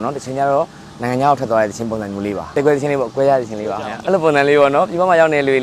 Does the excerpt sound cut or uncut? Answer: cut